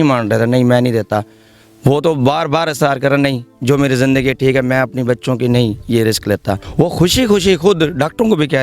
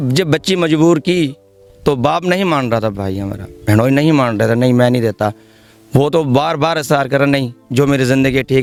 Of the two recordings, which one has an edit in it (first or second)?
first